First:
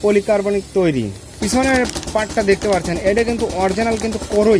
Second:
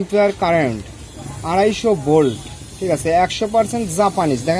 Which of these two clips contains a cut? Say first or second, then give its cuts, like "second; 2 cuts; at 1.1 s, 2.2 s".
first; 1 cut; at 1.3 s